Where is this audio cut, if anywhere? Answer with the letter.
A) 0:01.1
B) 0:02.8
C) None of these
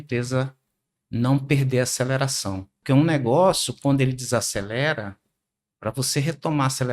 B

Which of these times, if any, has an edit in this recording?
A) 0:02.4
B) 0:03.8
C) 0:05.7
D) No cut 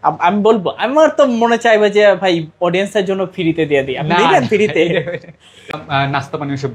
C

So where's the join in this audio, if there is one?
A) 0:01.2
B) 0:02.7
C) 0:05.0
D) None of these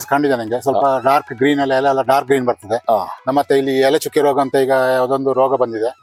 D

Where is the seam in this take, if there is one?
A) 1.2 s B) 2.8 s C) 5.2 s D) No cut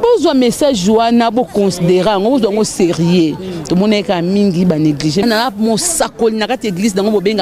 C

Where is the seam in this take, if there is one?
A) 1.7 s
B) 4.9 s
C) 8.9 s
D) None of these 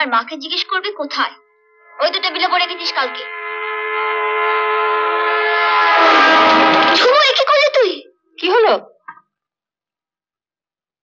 D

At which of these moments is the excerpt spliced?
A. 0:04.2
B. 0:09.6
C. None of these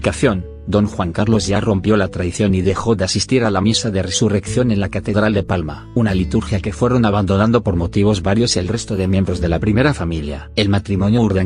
B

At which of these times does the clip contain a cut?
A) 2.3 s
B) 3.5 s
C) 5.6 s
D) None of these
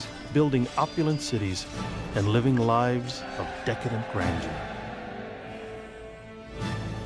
A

